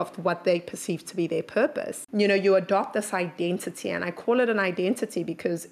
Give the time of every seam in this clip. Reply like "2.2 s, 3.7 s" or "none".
2.0 s